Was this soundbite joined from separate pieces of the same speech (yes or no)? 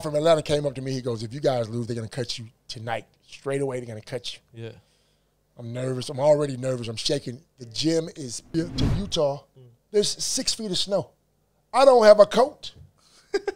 yes